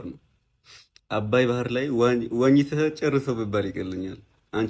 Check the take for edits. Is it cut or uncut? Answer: uncut